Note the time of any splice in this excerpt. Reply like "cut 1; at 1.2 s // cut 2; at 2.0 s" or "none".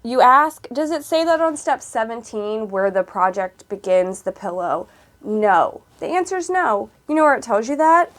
none

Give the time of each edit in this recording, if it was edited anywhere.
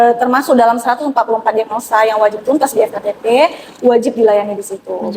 none

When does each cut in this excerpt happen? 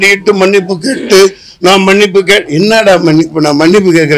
none

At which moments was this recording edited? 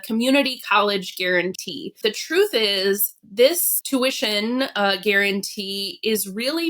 cut 1; at 1.9 s // cut 2; at 3.7 s

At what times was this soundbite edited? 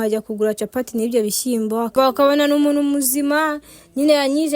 cut 1; at 1.9 s

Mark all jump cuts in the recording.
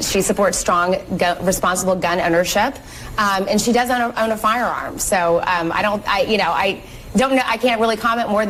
none

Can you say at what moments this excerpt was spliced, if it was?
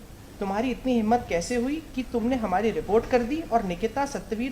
none

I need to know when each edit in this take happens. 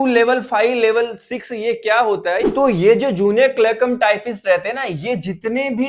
cut 1; at 2.5 s

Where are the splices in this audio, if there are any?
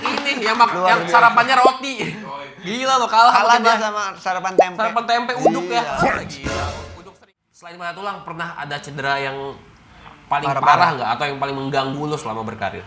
cut 1; at 7.1 s

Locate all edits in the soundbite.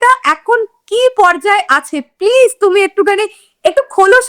none

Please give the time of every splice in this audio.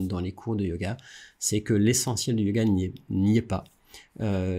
none

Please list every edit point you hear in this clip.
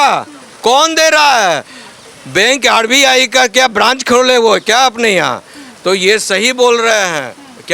none

